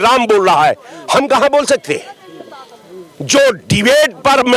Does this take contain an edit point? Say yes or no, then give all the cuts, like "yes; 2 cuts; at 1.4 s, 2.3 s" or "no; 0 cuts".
no; 0 cuts